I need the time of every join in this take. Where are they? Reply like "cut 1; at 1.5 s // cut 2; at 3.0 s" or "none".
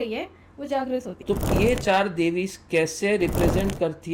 cut 1; at 1.1 s